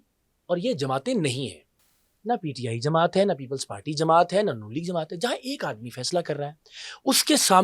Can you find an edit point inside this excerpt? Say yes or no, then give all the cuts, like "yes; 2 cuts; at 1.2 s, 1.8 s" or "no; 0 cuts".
no; 0 cuts